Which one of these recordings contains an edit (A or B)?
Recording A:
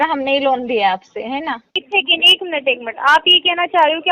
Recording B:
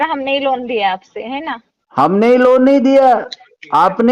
A